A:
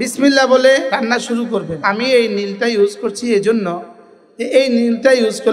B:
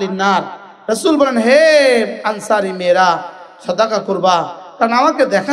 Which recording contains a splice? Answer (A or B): A